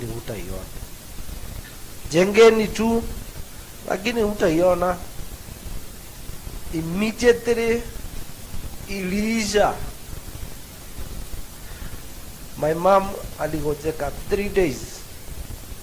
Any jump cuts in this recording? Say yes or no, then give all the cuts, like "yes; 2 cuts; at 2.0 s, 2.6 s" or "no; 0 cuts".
yes; 2 cuts; at 1.7 s, 6.4 s